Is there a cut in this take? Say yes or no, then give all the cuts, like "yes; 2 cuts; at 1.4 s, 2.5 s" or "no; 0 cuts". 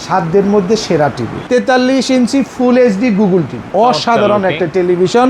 yes; 2 cuts; at 1.3 s, 3.6 s